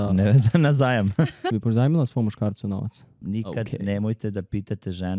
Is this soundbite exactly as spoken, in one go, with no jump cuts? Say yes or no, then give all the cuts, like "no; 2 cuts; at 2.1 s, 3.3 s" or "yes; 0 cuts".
no; 2 cuts; at 1.4 s, 3.2 s